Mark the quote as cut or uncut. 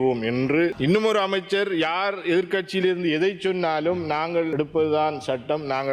cut